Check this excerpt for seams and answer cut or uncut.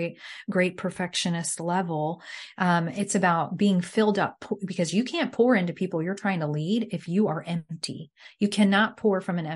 uncut